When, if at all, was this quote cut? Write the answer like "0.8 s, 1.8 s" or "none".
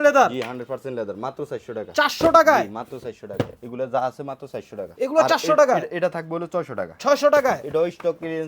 none